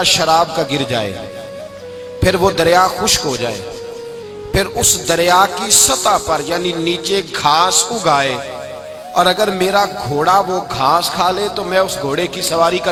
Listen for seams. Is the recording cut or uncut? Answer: uncut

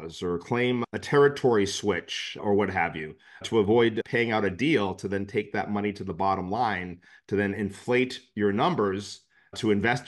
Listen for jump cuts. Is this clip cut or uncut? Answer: uncut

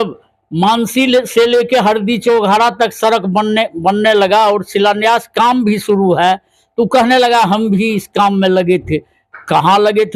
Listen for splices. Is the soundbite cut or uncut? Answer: uncut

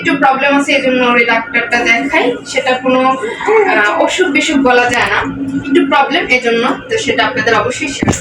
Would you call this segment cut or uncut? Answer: uncut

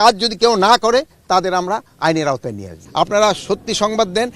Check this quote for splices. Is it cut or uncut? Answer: cut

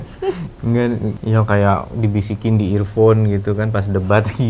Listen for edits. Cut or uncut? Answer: cut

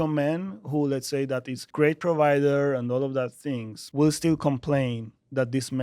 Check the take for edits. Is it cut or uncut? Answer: cut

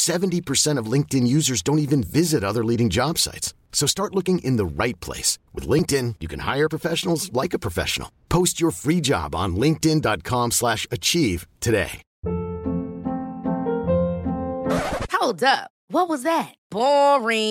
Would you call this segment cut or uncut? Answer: cut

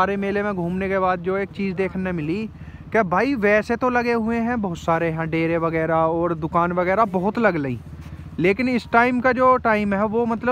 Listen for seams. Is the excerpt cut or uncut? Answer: uncut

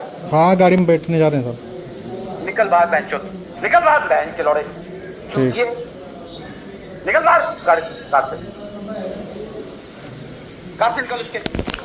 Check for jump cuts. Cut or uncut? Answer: uncut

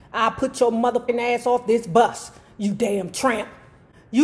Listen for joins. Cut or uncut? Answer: cut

